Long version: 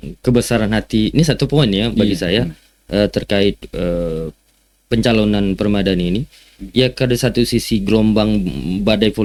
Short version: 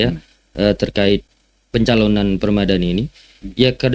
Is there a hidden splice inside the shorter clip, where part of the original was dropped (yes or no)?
yes